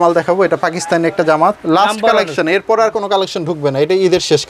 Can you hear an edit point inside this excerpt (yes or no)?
yes